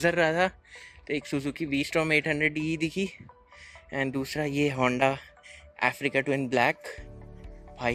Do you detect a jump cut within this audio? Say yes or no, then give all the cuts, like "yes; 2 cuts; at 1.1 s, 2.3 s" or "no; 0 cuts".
no; 0 cuts